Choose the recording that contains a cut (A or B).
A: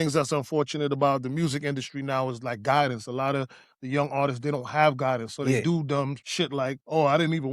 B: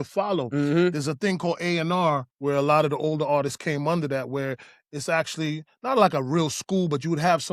A